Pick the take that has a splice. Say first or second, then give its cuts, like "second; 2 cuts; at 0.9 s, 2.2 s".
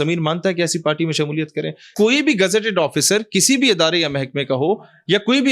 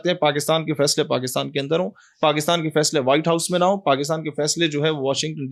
first; 1 cut; at 1.9 s